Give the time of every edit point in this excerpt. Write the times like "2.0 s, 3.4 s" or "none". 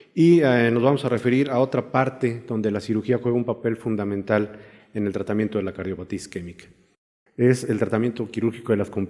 7.9 s